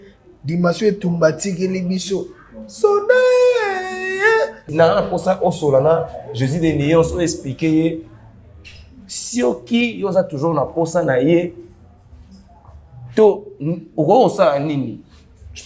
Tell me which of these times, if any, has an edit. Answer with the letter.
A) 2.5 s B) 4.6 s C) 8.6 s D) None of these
B